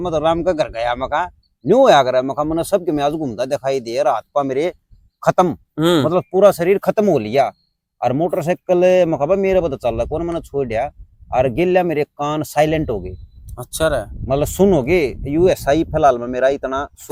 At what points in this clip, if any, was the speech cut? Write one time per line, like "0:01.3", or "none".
none